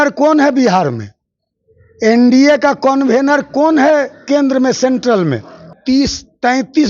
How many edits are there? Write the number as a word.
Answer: one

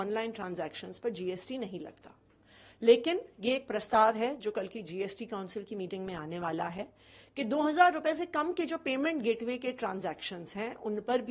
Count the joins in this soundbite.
zero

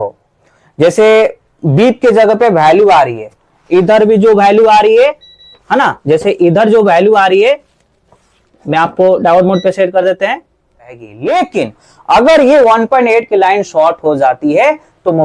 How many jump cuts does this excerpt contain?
one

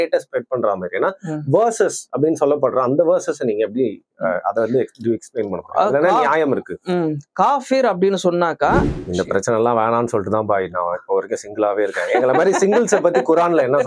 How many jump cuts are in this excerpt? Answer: one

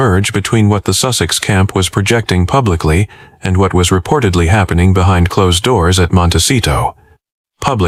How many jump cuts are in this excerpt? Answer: zero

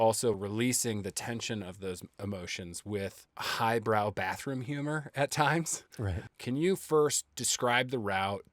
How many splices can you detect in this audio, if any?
one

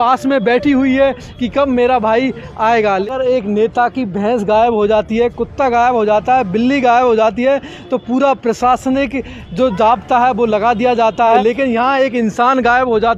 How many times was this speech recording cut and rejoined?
two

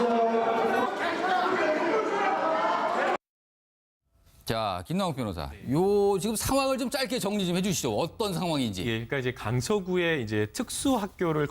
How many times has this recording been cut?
one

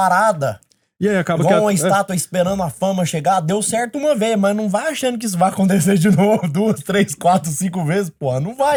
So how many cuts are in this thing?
zero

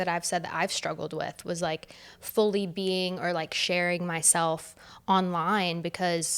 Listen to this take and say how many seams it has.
zero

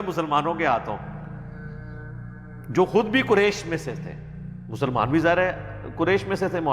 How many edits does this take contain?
two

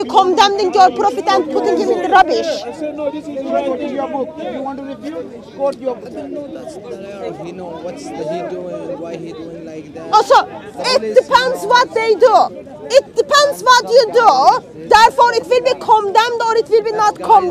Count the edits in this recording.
zero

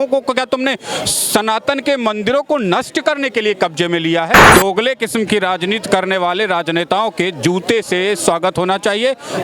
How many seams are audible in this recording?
one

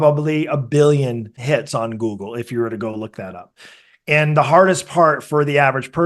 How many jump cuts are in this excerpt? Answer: one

